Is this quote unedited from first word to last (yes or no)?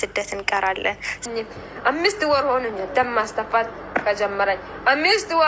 no